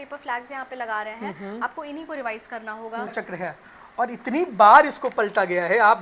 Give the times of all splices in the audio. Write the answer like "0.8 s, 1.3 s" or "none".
3.1 s